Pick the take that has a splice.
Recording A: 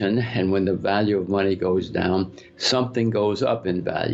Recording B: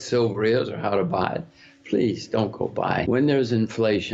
B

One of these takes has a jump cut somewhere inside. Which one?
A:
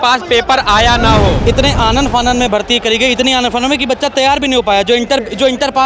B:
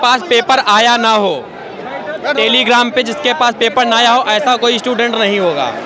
A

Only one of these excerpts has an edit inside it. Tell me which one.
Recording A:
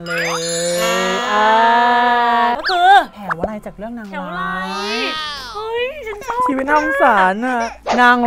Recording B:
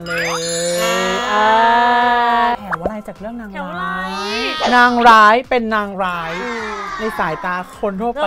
B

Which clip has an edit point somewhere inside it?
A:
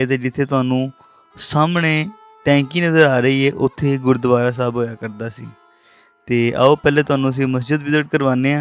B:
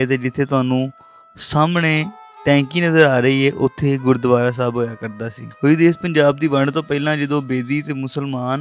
B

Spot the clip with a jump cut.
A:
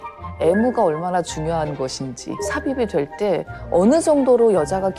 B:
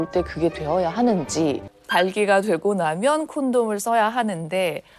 B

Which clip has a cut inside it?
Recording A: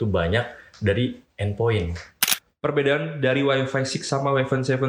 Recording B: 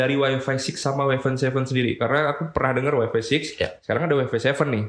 A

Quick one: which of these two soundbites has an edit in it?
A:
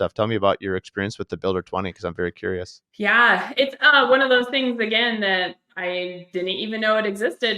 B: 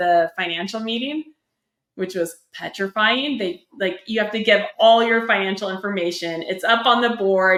A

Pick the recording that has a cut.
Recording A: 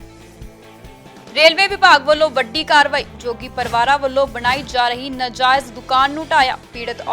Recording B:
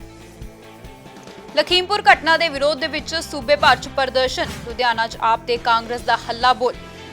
A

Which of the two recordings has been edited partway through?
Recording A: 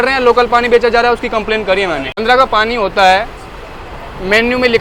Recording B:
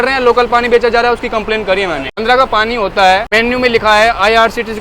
B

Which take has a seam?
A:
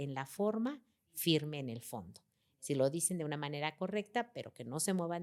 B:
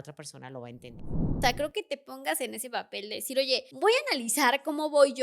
B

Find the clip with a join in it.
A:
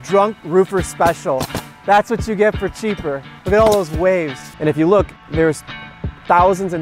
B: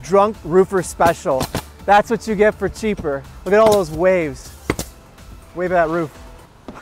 A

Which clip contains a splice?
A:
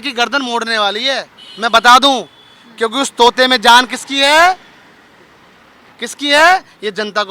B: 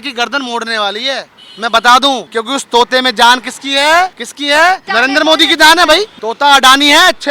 B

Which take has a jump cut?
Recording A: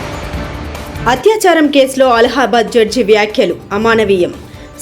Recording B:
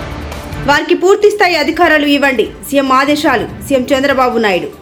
A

